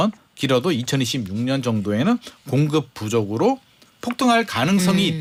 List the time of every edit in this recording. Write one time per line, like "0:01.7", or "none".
none